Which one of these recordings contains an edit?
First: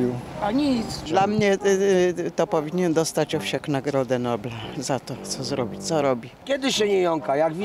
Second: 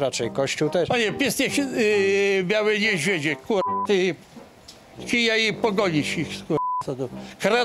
first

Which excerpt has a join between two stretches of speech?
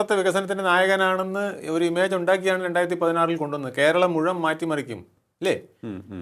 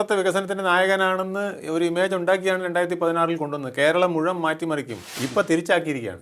second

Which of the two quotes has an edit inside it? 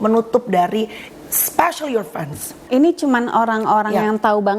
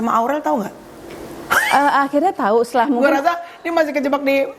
first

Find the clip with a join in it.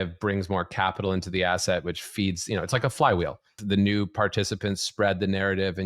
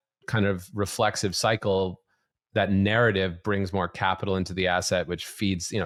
first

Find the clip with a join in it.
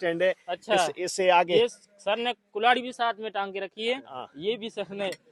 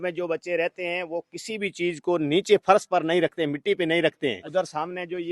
second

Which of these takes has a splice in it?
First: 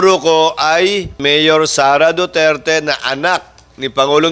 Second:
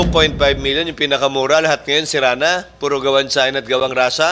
first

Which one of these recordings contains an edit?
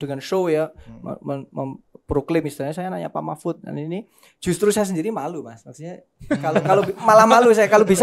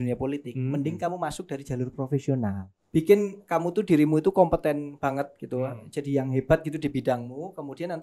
second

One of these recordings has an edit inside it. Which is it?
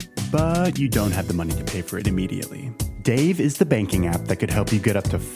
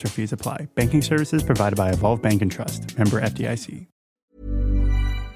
second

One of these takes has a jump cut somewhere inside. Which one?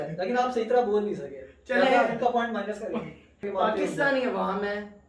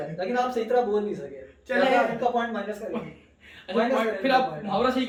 first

